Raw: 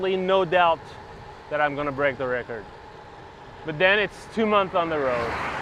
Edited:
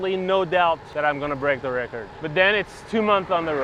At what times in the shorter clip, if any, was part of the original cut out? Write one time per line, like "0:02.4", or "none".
0:00.9
0:02.1